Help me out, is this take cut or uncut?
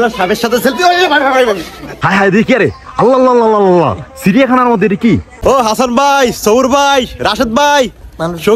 cut